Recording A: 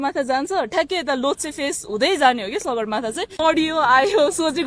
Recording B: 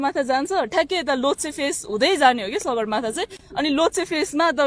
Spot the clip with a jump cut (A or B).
A